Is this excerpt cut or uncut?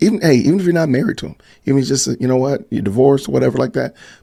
uncut